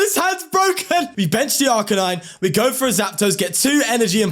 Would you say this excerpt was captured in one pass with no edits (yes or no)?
no